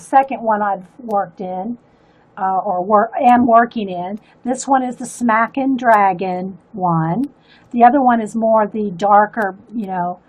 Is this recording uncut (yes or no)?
yes